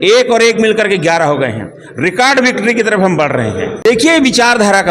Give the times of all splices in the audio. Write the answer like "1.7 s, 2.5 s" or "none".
3.8 s

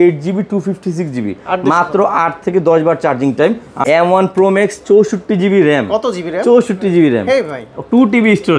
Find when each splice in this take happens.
3.7 s

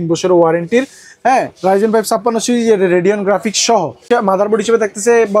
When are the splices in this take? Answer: 4.0 s

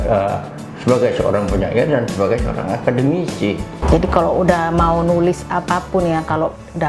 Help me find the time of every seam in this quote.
3.7 s

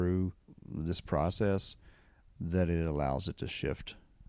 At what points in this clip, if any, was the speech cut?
none

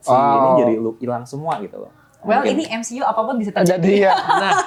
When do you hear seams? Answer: none

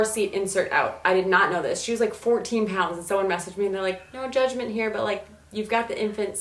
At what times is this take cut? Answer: none

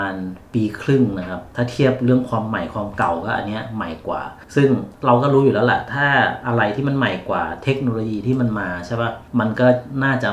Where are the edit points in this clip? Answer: none

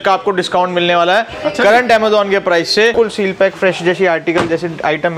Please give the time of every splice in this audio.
2.9 s

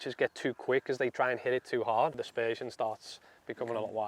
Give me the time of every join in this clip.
2.2 s

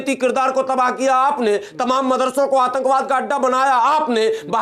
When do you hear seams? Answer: none

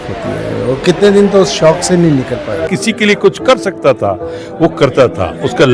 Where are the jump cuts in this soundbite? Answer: 2.7 s

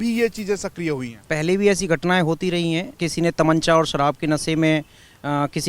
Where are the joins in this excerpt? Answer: 1.2 s, 3.0 s

